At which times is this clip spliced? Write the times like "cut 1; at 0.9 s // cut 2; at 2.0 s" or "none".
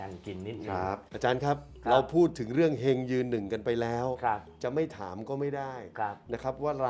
cut 1; at 1.1 s